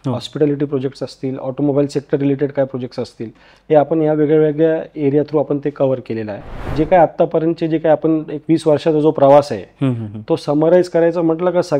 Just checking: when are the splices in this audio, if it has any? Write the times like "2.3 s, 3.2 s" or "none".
6.7 s